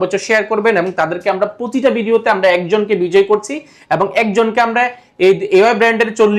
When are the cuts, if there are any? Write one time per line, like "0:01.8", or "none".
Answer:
none